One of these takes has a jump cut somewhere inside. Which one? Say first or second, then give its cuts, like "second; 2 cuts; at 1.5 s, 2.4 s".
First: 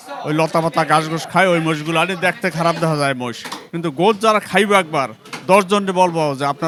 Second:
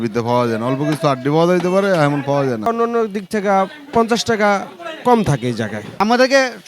second; 2 cuts; at 2.7 s, 6.0 s